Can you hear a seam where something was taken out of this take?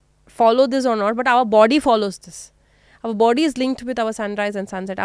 no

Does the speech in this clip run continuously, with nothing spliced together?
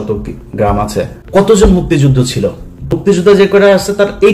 no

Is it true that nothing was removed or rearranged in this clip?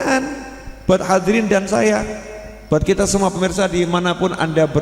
yes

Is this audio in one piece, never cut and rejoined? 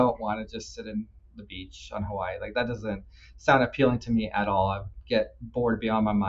yes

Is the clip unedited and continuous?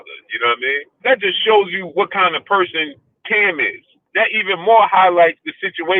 no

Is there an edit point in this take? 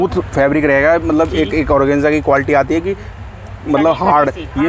no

